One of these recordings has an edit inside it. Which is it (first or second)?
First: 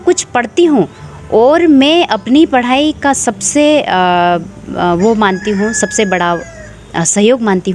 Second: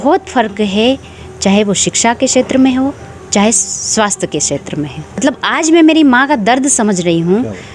second